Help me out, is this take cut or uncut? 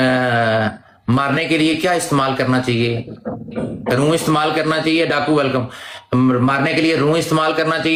uncut